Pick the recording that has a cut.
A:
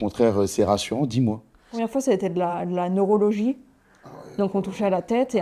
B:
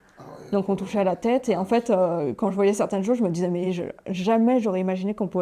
A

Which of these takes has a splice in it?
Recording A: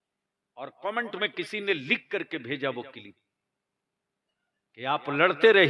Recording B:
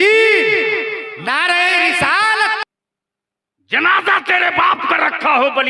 B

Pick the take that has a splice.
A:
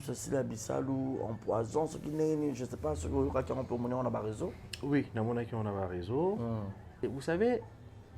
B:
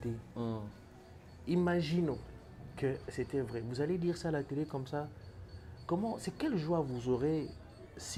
A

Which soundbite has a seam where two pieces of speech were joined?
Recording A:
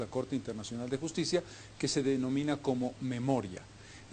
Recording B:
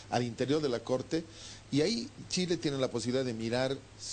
A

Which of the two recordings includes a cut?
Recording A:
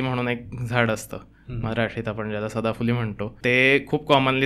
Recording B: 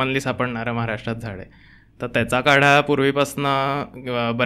A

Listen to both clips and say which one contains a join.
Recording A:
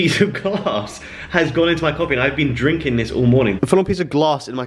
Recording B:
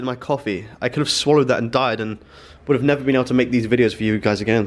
A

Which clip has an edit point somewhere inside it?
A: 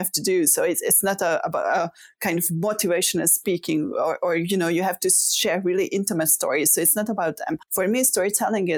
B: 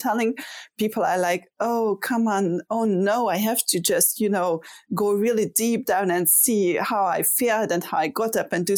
A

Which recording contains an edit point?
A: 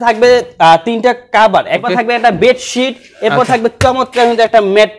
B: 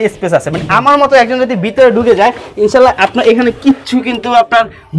A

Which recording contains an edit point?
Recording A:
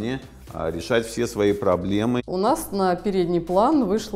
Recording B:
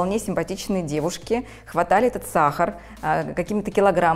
A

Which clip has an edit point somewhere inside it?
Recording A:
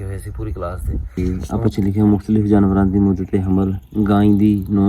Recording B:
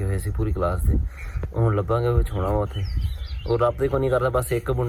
A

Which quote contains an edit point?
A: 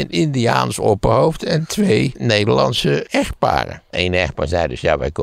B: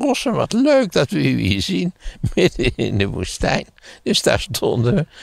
A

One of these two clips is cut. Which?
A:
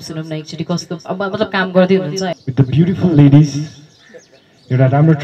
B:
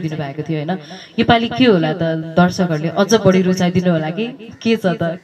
A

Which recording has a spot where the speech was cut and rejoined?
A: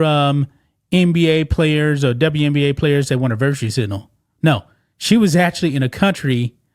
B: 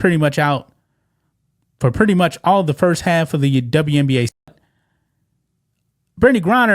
B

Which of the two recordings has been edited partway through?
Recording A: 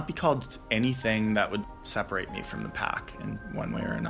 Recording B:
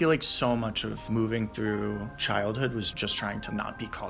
B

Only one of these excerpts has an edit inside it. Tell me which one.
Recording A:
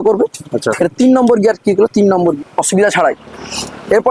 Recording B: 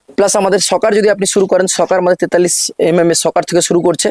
A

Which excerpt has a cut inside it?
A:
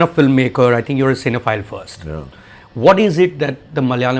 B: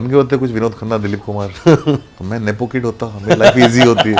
B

